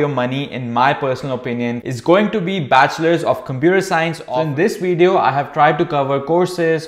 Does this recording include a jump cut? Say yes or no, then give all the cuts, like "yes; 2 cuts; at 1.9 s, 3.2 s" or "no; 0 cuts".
yes; 1 cut; at 4.3 s